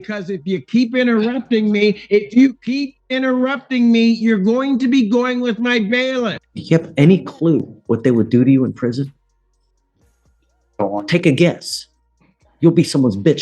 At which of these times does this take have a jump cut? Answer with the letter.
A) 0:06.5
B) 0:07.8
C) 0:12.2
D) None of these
A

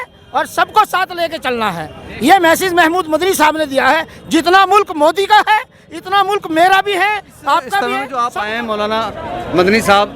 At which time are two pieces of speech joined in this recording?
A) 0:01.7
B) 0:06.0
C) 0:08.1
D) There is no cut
C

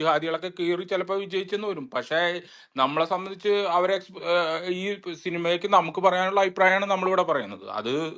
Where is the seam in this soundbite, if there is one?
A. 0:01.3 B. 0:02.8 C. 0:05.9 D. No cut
D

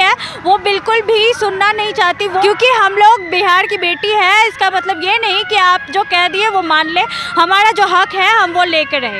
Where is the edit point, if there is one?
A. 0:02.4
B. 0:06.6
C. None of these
A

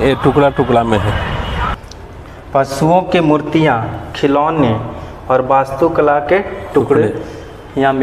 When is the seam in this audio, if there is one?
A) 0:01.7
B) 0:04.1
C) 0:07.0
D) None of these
A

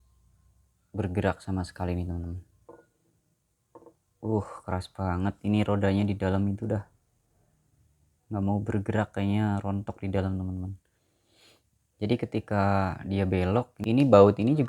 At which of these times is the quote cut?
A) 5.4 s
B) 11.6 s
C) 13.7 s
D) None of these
C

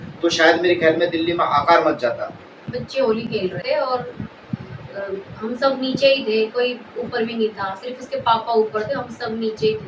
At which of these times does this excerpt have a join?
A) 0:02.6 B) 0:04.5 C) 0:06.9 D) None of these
A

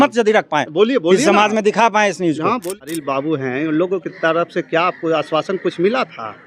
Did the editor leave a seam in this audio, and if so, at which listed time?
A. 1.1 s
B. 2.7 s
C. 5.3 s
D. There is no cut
B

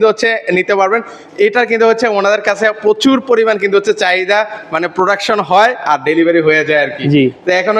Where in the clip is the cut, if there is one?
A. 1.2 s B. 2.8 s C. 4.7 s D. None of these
D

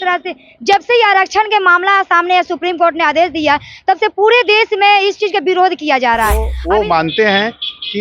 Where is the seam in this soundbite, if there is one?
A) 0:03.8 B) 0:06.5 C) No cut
B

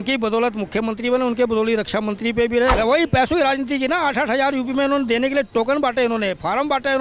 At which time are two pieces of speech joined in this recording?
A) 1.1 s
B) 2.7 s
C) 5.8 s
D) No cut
B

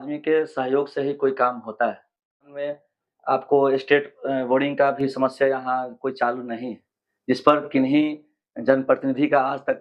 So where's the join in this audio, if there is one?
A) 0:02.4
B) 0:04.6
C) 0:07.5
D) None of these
A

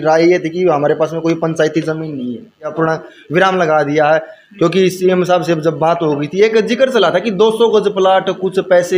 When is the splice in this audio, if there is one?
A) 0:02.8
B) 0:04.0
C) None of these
A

